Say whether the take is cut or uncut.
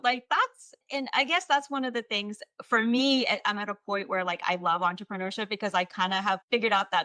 uncut